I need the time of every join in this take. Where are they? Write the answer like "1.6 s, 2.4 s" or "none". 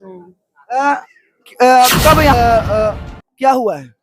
2.3 s